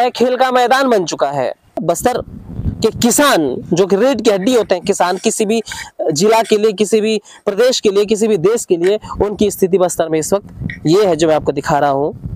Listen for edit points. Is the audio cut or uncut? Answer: cut